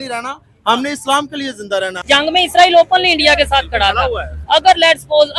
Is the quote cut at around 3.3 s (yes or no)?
no